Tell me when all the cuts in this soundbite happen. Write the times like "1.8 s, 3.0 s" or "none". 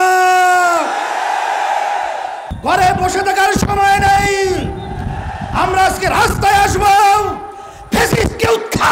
2.4 s